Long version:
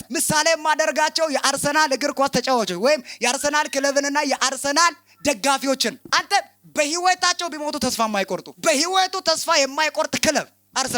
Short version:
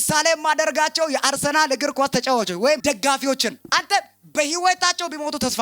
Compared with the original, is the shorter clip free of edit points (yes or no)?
no